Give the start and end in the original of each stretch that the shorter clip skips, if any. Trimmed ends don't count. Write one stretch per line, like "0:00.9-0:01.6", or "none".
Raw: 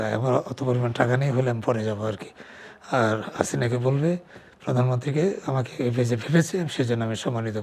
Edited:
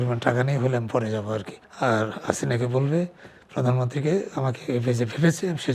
0:02.3-0:02.7